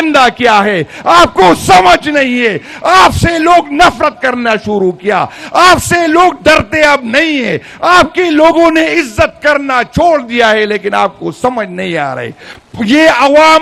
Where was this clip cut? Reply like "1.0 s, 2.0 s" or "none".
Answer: none